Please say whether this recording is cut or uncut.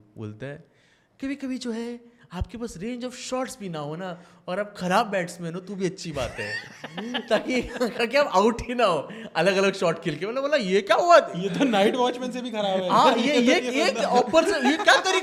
uncut